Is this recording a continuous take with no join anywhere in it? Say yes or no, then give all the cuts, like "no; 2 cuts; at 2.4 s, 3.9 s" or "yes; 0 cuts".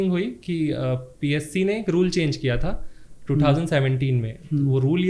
yes; 0 cuts